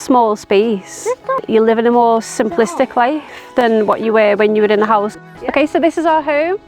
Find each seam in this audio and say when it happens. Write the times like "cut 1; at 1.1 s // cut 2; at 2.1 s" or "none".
cut 1; at 1.3 s // cut 2; at 5.2 s

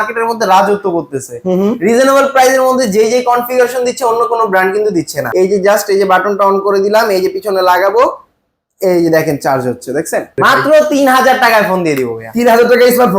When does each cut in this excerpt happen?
cut 1; at 5.2 s // cut 2; at 10.3 s

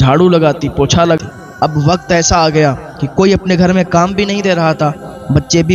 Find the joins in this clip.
cut 1; at 1.2 s

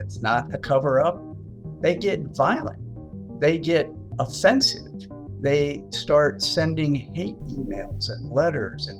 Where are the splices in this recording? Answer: cut 1; at 1.3 s // cut 2; at 4.2 s

